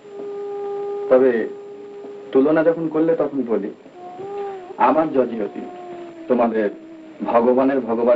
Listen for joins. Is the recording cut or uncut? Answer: uncut